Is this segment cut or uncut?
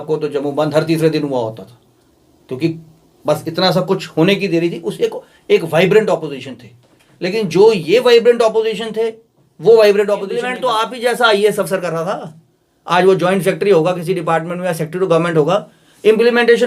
cut